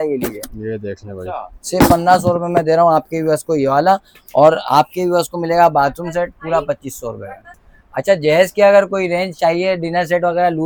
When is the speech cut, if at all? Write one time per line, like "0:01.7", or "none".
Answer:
none